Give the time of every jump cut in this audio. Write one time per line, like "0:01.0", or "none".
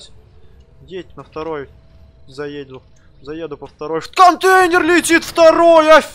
none